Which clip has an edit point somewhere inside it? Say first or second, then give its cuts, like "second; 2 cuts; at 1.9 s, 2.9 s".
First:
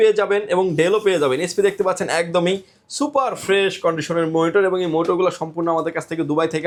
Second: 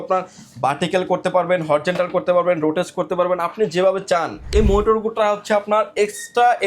second; 1 cut; at 4.5 s